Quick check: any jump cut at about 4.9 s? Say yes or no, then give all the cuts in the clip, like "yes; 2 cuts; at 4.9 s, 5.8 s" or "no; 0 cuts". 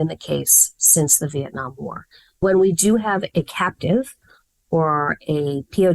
no; 2 cuts; at 2.4 s, 3.3 s